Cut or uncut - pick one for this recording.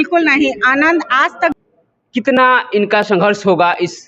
cut